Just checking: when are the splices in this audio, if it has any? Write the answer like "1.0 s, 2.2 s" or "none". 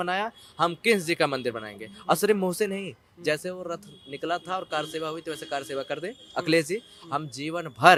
none